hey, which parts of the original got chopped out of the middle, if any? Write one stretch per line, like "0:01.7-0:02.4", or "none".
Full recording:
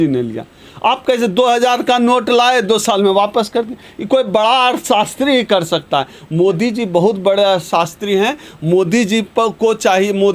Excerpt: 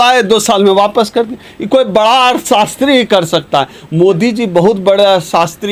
none